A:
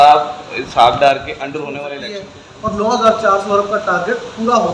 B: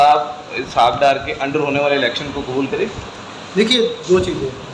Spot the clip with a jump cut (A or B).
A